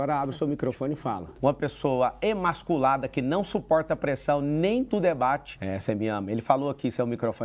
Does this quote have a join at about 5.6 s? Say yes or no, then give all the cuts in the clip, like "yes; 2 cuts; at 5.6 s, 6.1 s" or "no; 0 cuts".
yes; 2 cuts; at 1.3 s, 5.6 s